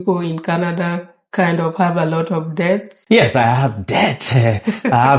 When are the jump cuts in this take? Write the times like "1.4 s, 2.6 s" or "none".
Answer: 2.9 s

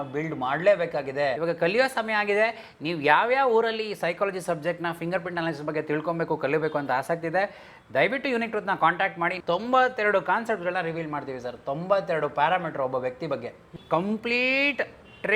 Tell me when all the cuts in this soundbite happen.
1.4 s, 9.4 s, 13.7 s

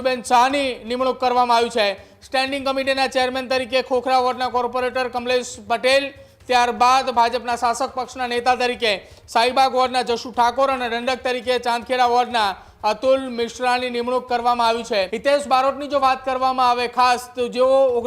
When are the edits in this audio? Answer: 15.1 s

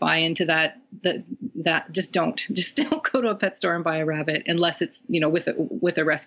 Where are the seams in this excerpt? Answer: 5.0 s

